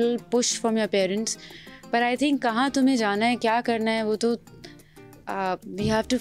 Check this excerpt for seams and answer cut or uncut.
uncut